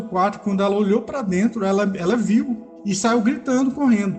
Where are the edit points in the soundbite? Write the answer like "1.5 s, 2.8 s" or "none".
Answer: 2.7 s